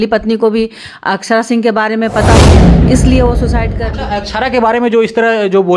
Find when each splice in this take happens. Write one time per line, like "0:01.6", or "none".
0:03.8